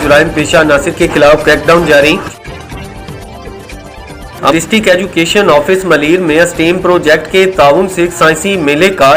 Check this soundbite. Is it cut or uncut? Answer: cut